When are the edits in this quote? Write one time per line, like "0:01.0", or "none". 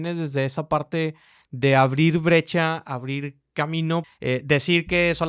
0:04.1